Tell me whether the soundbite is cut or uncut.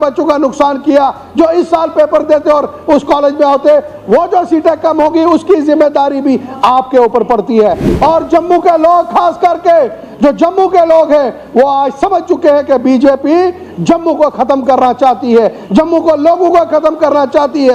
uncut